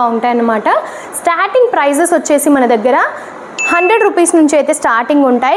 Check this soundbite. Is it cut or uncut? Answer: uncut